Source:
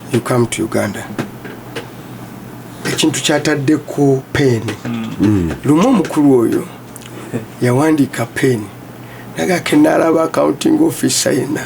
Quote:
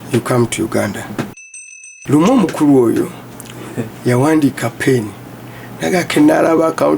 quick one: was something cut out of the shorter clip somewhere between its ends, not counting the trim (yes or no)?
yes